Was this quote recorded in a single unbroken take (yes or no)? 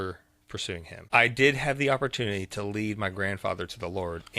no